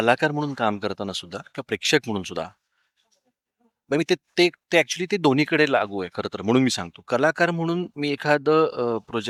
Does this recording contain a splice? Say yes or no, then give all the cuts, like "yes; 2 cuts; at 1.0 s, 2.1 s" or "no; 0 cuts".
no; 0 cuts